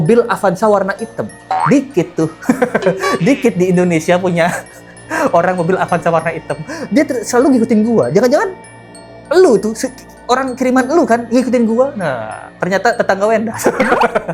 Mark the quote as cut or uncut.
uncut